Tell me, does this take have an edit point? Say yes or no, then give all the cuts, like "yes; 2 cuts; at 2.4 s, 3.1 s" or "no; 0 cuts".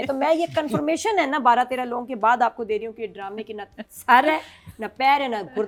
no; 0 cuts